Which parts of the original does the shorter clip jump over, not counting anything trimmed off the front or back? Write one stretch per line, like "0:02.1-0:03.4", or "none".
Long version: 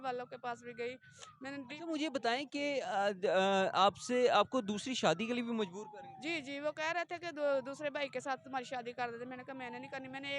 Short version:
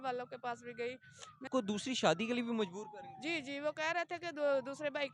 0:01.5-0:04.5